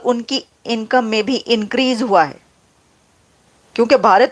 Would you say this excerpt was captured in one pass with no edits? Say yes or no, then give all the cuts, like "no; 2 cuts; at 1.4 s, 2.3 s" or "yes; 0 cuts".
yes; 0 cuts